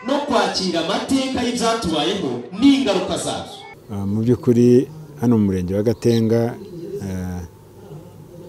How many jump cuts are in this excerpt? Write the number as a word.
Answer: one